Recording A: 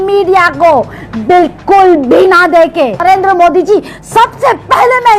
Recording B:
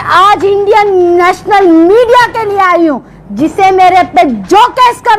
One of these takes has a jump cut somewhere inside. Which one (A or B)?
A